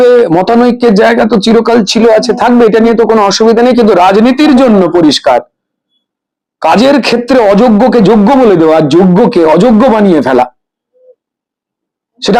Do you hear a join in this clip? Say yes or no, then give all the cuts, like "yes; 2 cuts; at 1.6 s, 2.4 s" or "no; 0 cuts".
no; 0 cuts